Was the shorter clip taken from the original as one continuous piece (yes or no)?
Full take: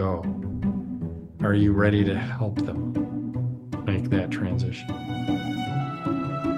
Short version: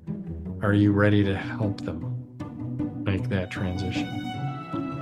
no